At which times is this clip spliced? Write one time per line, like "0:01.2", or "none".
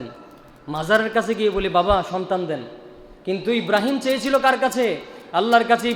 none